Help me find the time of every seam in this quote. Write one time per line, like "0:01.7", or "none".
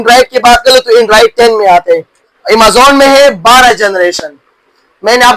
0:01.9